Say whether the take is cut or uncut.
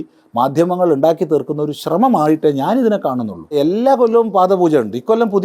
cut